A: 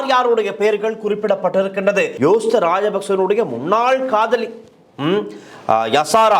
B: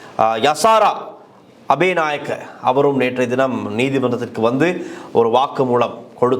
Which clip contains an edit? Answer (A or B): A